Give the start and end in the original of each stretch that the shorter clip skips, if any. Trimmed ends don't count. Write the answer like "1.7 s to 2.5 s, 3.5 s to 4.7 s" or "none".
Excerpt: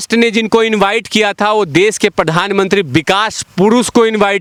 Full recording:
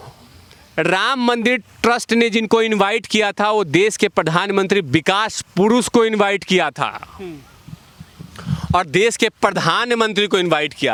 none